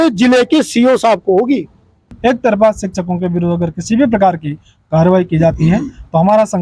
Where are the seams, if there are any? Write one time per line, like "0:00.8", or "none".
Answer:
0:02.2